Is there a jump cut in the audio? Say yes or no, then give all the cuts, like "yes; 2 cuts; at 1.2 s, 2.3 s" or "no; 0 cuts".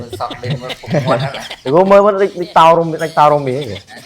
yes; 1 cut; at 1.5 s